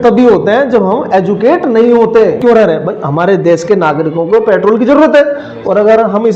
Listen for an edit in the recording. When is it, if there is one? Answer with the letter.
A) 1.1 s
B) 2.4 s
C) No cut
B